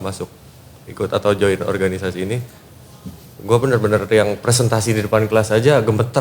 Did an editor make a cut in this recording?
no; 0 cuts

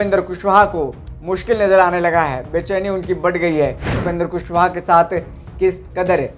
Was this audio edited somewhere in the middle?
yes; 1 cut; at 4.0 s

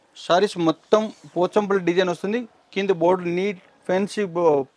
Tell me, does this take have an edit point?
no; 0 cuts

